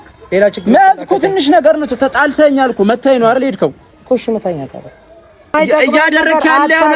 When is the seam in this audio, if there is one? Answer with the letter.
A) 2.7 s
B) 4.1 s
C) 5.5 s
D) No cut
C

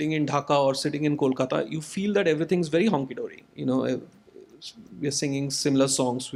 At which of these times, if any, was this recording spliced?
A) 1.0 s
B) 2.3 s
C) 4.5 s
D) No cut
D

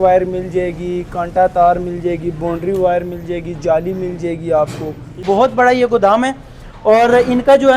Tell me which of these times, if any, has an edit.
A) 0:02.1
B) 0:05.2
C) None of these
B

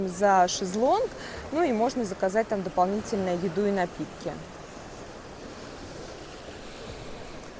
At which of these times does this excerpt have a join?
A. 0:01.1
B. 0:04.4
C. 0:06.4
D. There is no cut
D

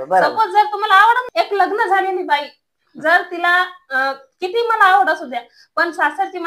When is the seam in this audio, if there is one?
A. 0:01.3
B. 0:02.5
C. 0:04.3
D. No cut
A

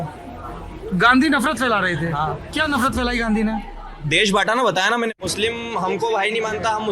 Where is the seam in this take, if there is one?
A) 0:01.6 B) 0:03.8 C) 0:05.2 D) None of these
C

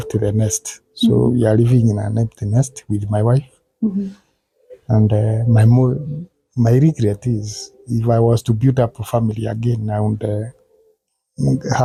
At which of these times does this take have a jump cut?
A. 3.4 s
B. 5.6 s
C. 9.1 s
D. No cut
D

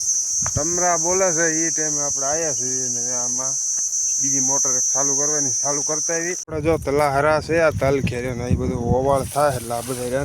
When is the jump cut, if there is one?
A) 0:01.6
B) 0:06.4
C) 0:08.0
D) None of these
B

